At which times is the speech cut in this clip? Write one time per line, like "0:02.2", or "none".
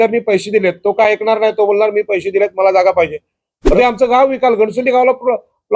0:03.8